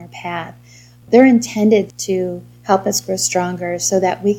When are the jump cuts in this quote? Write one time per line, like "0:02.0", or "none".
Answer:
0:01.1
0:02.0